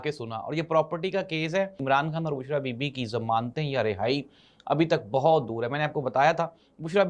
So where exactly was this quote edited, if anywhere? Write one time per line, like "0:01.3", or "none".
0:01.8

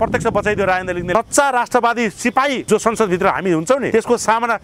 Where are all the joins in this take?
0:01.1
0:02.6
0:03.9

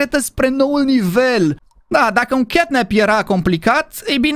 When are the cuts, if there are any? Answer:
0:01.7

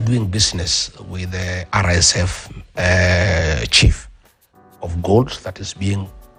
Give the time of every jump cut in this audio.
none

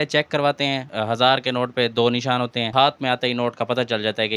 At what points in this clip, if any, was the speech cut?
0:00.8
0:02.7

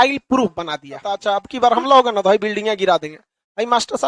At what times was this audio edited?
0:01.2

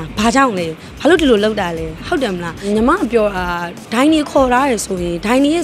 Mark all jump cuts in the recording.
0:02.6

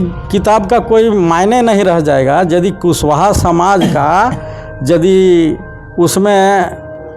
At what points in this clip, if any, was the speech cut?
none

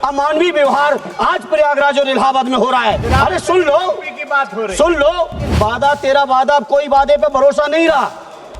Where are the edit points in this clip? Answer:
0:03.0
0:05.5

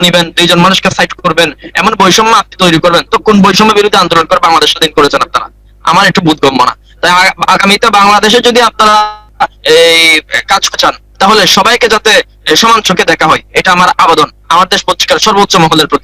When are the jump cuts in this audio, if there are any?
none

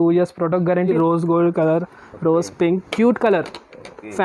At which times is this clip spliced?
0:00.9

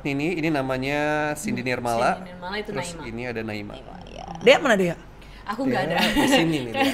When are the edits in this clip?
none

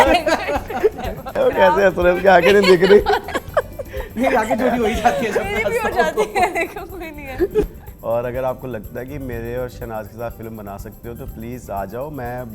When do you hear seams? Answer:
0:01.2
0:07.6

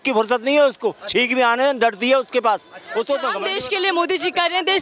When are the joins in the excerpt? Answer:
0:03.3

